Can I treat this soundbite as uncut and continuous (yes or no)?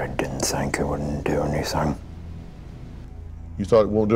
yes